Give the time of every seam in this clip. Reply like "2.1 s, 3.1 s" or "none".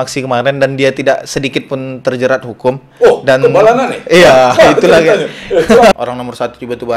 5.9 s